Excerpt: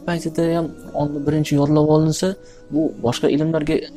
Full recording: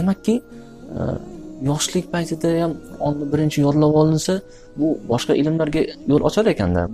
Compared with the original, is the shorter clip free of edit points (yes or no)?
yes